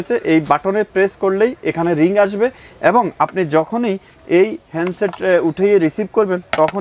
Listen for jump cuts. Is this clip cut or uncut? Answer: uncut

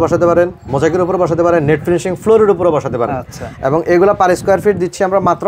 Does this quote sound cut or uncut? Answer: uncut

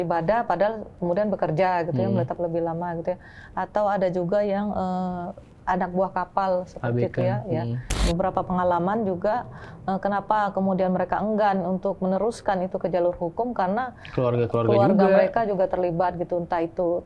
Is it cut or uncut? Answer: cut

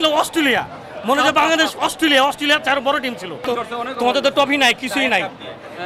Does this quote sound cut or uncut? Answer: cut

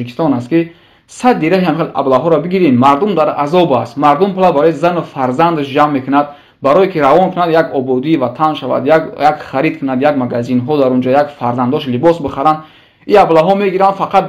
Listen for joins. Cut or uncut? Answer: uncut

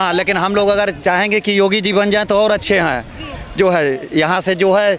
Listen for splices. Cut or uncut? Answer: uncut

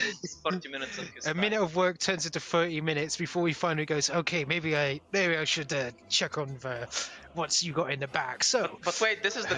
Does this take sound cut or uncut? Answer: cut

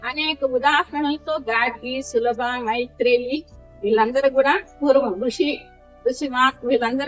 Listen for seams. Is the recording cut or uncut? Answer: uncut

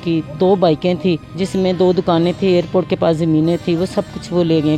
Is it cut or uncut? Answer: cut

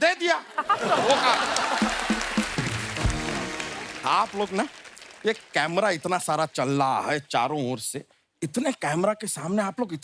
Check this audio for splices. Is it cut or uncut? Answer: uncut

